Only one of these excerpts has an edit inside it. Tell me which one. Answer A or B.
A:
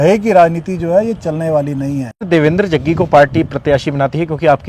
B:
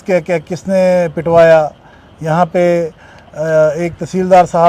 A